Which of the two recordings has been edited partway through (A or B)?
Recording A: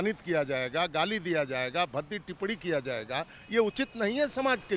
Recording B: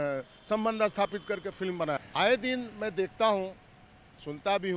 B